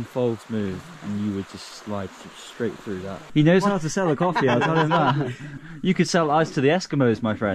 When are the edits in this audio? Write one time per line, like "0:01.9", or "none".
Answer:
0:03.2
0:05.5